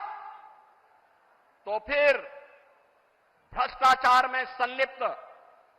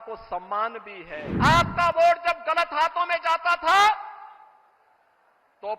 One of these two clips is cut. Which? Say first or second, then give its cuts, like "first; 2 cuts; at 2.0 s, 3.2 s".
second; 1 cut; at 1.3 s